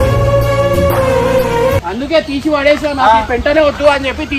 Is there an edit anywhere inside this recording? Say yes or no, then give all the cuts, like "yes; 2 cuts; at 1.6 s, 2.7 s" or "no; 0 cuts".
yes; 1 cut; at 1.9 s